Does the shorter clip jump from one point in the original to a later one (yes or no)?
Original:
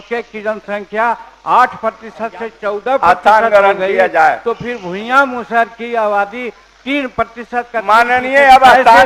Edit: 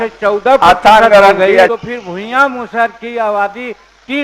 yes